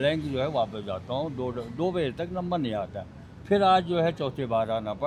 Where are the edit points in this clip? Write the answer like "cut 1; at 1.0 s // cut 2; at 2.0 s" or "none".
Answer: none